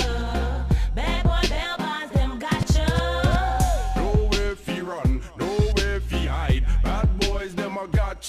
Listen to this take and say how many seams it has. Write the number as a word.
one